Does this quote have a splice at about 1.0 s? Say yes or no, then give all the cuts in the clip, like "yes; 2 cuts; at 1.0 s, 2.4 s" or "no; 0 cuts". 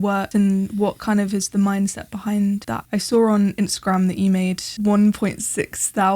no; 2 cuts; at 2.7 s, 4.7 s